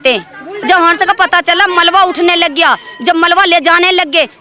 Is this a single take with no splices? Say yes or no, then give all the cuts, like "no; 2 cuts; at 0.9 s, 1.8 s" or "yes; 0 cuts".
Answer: yes; 0 cuts